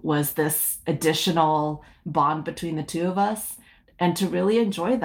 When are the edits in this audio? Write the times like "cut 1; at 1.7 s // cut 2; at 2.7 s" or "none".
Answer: cut 1; at 3.8 s